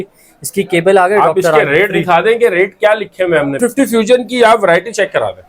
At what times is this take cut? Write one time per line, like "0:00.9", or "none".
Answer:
0:03.6